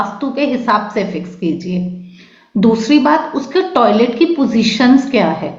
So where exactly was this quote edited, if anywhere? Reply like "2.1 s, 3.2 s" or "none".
none